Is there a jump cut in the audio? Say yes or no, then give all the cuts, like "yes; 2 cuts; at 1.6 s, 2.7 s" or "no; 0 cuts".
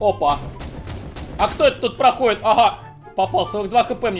no; 0 cuts